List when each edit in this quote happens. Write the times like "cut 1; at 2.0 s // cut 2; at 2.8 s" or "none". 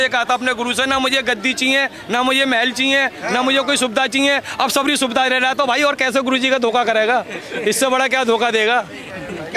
none